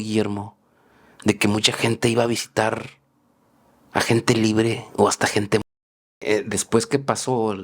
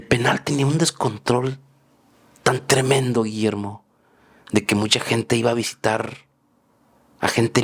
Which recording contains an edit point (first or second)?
first